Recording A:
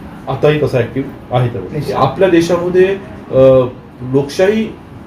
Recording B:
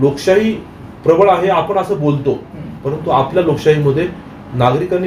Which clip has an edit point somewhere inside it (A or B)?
A